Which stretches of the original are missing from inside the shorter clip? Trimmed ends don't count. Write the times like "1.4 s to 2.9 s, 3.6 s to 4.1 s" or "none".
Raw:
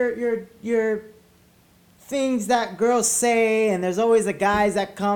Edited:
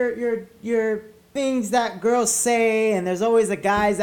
1.2 s to 1.9 s